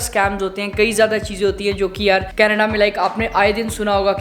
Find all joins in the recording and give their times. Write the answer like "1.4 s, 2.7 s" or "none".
none